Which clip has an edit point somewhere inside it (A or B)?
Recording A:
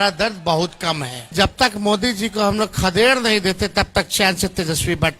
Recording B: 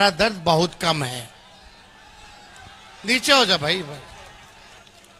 A